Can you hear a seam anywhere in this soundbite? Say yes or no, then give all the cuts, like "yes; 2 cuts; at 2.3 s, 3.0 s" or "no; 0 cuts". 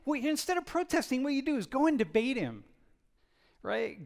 no; 0 cuts